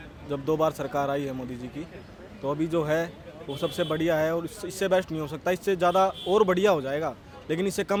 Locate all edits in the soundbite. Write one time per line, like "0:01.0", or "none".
none

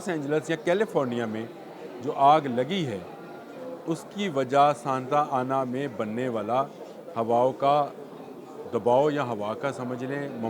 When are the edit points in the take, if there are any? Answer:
none

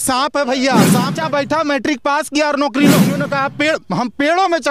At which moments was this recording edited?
0:01.1
0:03.2

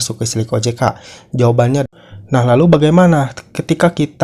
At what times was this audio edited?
0:01.8

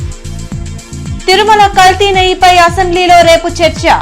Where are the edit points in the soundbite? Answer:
0:00.9

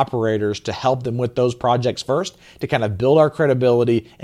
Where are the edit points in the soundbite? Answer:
none

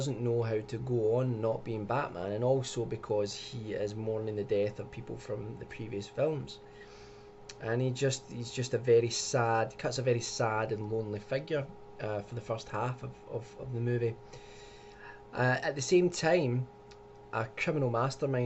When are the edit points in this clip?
0:13.6

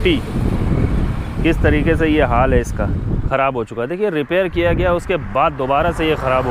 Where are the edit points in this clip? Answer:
0:03.2

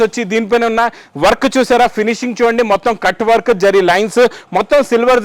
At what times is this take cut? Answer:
none

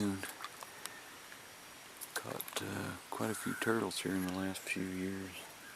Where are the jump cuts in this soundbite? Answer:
0:04.0

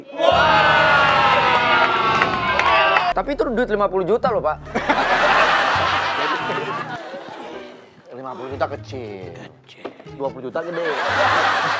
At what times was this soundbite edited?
0:03.1
0:07.0

